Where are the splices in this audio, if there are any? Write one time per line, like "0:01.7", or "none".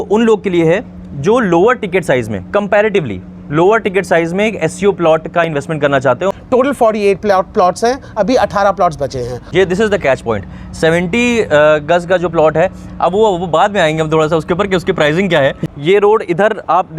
0:06.3
0:09.4
0:15.6